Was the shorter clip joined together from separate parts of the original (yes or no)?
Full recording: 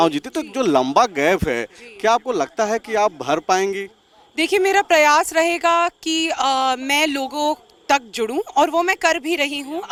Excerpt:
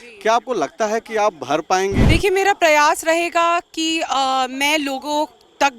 yes